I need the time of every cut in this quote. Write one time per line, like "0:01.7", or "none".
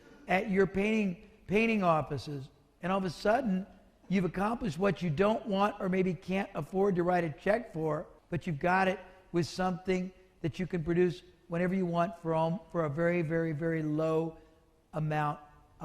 0:08.1

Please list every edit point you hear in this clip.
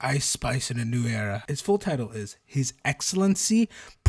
0:01.4

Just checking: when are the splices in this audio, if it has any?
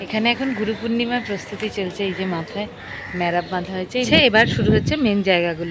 0:04.1

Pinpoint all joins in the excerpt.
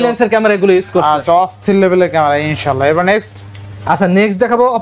none

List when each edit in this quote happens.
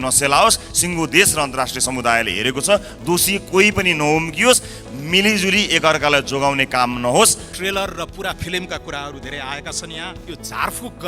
0:07.5
0:10.2

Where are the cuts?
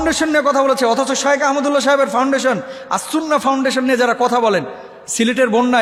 none

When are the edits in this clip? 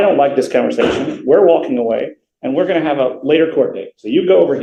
none

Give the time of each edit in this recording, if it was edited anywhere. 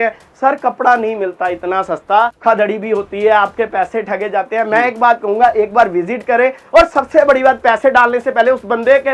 0:02.4

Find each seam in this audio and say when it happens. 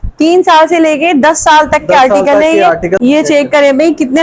0:03.0

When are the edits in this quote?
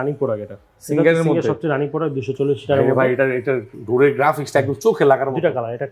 none

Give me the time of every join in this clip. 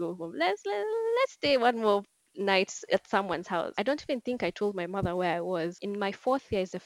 0:03.8
0:05.8

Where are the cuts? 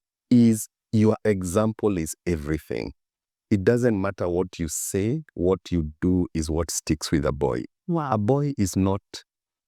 none

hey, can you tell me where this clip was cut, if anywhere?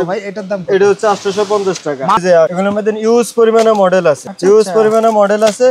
0:02.2
0:04.3

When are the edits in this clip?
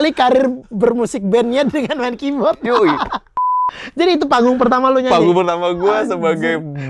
0:03.5

